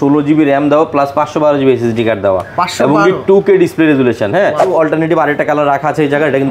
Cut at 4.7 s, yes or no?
yes